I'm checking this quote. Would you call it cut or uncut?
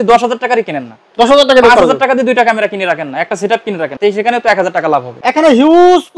cut